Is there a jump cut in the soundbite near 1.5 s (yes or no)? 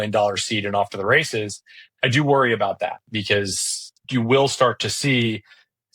no